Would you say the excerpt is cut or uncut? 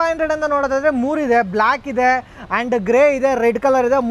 uncut